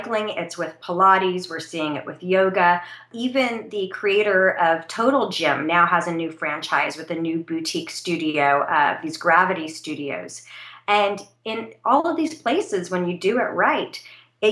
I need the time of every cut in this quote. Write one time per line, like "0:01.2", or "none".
0:03.0